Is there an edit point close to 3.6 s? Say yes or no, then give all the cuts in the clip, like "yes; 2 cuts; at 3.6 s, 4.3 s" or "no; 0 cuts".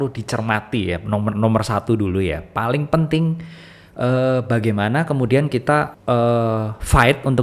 no; 1 cut; at 5.9 s